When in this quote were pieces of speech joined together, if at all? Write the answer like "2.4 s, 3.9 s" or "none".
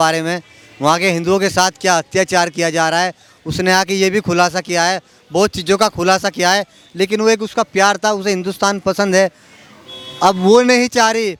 none